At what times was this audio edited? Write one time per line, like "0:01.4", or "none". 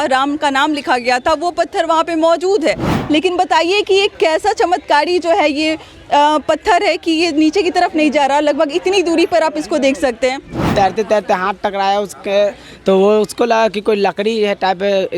0:02.9
0:10.6